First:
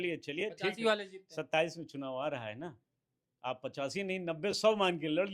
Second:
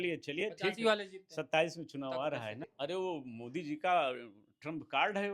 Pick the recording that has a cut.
second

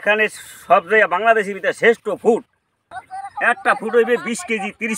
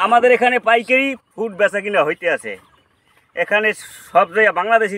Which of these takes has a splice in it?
first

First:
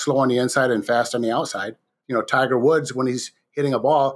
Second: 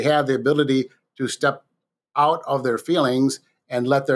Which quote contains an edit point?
first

